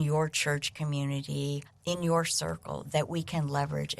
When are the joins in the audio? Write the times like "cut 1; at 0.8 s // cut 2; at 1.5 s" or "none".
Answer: cut 1; at 1.7 s